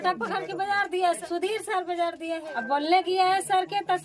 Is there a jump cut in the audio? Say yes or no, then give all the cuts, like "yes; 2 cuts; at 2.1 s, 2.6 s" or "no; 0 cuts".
yes; 2 cuts; at 1.2 s, 2.5 s